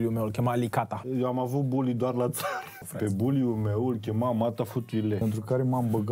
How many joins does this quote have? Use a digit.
3